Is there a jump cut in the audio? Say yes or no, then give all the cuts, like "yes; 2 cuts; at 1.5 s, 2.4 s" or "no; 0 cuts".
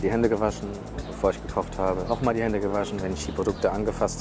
yes; 1 cut; at 2.0 s